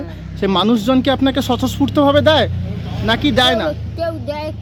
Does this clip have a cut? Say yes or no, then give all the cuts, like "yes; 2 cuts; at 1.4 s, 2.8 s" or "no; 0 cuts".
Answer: no; 0 cuts